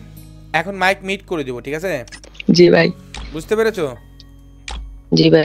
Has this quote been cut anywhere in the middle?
no; 0 cuts

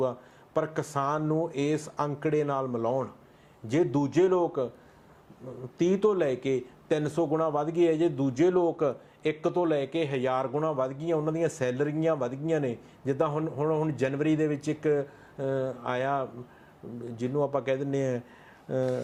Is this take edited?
no; 0 cuts

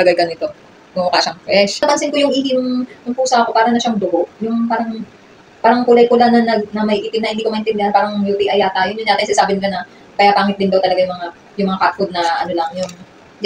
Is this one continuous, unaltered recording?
no; 1 cut; at 1.8 s

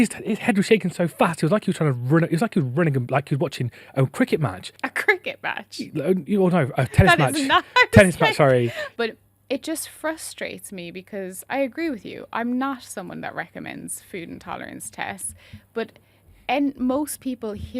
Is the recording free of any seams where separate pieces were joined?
no; 2 cuts; at 4.7 s, 8.8 s

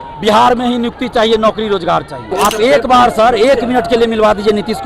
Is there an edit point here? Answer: yes; 1 cut; at 2.2 s

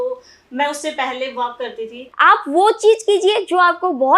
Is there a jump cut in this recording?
yes; 1 cut; at 2.1 s

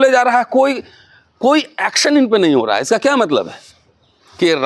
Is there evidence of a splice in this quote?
no; 0 cuts

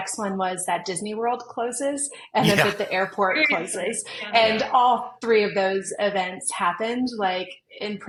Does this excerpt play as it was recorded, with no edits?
yes; 0 cuts

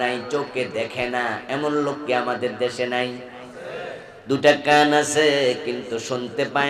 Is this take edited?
no; 0 cuts

